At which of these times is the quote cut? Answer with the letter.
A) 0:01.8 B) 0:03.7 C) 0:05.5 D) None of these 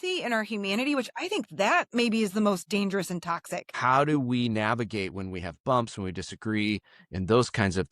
B